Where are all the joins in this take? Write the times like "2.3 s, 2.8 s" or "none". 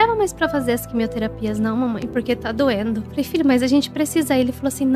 3.1 s